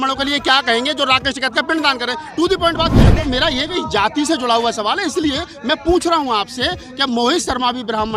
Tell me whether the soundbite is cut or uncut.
cut